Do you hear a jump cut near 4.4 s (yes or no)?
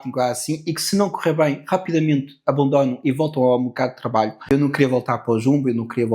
yes